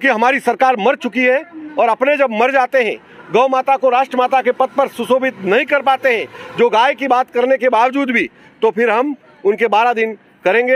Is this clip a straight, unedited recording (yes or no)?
yes